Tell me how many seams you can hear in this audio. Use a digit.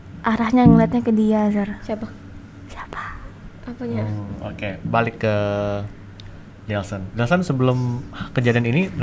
0